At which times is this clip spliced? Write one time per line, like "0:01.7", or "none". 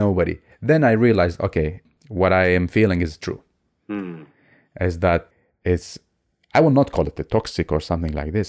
none